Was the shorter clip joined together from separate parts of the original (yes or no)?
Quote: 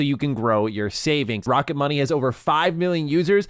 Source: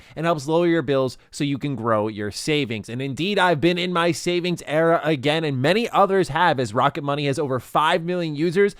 yes